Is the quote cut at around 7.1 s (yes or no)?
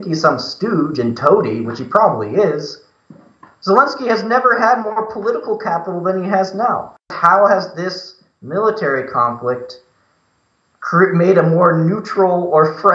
yes